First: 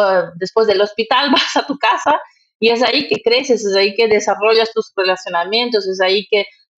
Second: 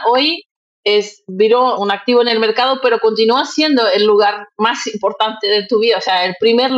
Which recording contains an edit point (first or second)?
second